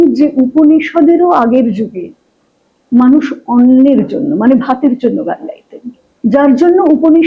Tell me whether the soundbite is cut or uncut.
uncut